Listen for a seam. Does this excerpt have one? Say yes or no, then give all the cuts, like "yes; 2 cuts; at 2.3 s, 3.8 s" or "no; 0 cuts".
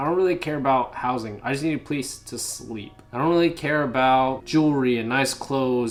no; 0 cuts